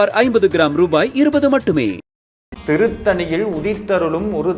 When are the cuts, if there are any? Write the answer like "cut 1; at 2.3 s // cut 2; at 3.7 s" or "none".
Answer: cut 1; at 2.5 s